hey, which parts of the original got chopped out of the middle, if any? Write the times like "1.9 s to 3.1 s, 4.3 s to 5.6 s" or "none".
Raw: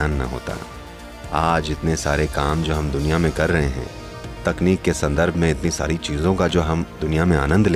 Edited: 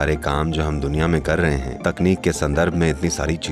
3.8 s to 4.3 s